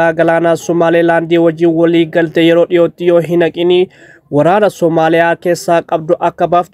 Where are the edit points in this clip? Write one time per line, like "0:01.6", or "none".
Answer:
none